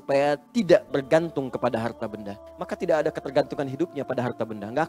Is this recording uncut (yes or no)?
no